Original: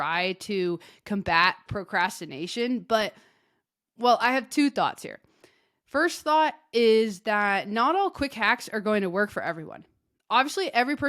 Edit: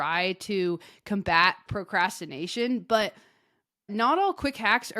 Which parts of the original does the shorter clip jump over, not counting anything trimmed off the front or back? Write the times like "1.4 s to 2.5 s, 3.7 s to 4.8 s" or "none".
3.9 s to 7.7 s